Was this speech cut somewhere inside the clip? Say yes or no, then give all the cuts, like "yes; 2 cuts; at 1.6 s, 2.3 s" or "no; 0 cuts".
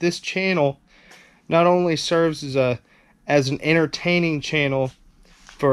no; 0 cuts